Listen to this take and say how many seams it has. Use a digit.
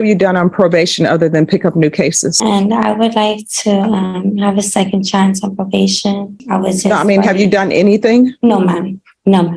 2